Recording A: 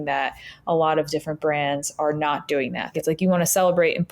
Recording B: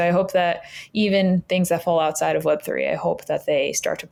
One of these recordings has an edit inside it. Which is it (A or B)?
A